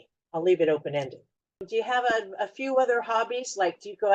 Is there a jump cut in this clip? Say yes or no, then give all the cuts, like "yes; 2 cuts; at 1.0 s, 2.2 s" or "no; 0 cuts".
yes; 1 cut; at 1.7 s